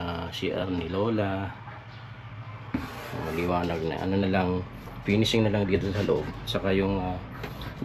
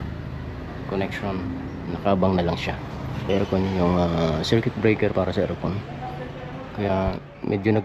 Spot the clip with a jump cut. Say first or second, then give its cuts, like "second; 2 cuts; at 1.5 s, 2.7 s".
second; 1 cut; at 3.2 s